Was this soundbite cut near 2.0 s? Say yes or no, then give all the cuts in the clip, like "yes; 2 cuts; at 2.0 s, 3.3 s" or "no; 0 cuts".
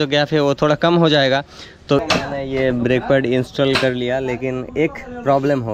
yes; 1 cut; at 2.0 s